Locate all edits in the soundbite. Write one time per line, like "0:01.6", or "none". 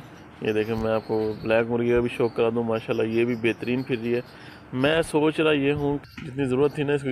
0:06.0